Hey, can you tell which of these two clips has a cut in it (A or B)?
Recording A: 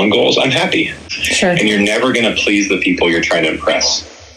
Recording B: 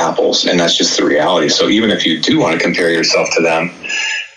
A